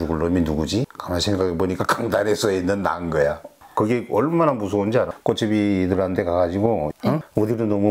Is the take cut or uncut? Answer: cut